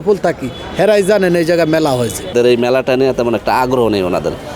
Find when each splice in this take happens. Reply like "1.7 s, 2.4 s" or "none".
2.3 s

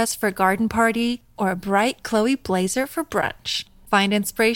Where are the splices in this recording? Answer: none

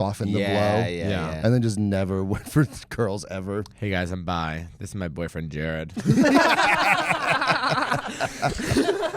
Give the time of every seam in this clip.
none

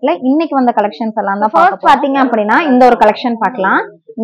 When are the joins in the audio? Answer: 1.5 s

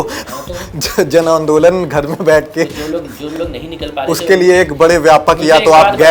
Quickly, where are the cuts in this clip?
none

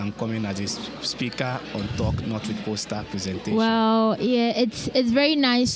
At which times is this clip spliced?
none

